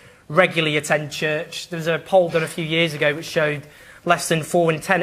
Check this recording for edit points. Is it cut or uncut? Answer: cut